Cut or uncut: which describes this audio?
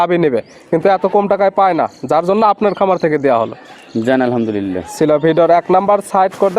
uncut